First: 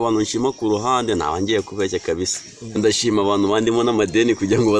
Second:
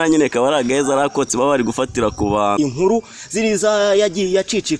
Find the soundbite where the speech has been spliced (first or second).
second